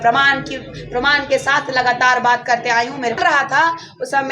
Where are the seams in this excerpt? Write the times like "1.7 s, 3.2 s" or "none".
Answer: 3.2 s